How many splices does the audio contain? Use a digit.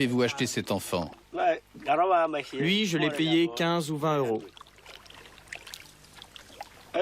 1